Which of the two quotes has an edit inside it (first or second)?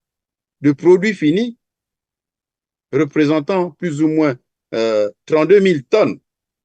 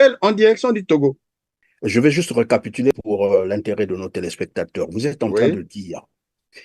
second